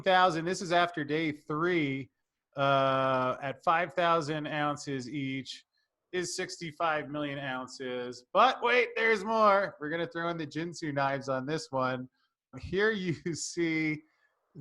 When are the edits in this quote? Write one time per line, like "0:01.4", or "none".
0:12.6